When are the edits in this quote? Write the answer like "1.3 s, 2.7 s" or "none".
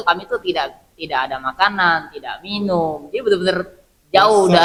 none